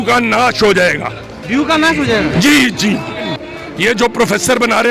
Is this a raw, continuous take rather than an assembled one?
no; 1 cut; at 3.3 s

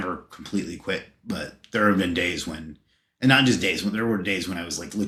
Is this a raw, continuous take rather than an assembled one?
yes; 0 cuts

